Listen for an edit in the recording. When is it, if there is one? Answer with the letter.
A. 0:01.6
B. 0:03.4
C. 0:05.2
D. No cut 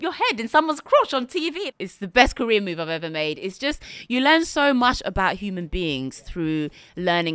A